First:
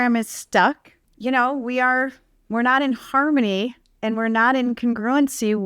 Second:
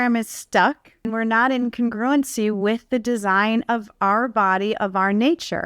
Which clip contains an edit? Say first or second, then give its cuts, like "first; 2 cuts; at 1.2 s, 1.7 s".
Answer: second; 1 cut; at 0.9 s